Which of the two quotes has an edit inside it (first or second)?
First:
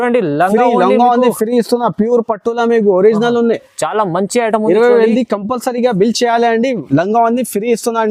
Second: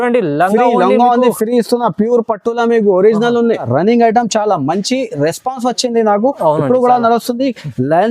second